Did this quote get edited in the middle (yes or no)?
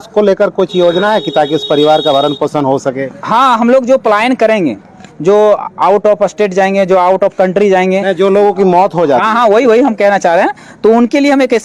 no